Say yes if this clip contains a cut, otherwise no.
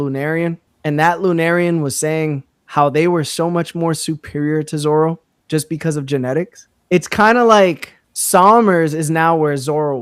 no